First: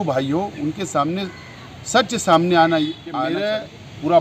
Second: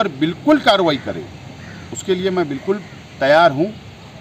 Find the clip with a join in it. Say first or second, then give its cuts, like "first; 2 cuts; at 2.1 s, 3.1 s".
first; 1 cut; at 3.1 s